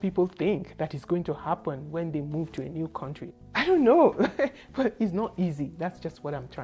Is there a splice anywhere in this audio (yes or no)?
no